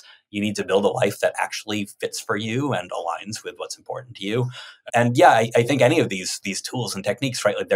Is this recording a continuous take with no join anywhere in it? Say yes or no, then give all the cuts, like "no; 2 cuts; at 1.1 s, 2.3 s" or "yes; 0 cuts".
yes; 0 cuts